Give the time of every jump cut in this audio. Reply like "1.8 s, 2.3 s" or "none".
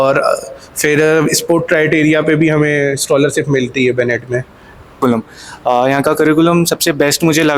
5.0 s